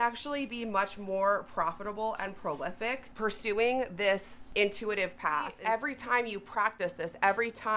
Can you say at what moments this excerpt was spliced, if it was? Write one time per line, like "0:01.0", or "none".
0:03.1
0:04.4
0:05.5